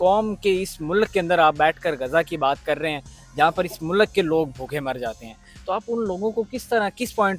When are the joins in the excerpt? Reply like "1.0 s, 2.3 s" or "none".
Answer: none